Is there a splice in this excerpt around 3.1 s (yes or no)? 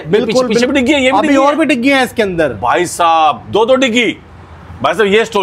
no